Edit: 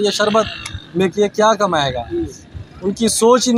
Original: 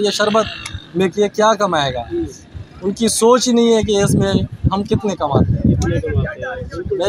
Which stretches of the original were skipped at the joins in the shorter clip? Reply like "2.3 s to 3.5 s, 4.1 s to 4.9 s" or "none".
none